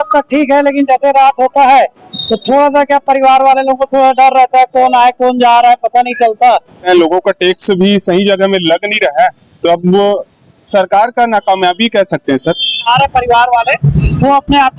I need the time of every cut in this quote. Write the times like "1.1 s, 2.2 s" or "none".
6.9 s, 12.9 s